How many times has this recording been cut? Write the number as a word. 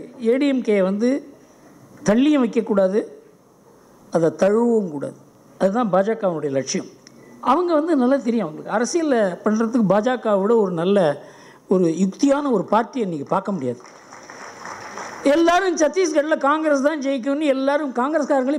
zero